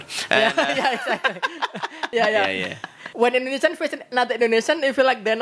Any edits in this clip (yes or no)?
yes